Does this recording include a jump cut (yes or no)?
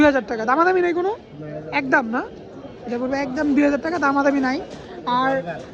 no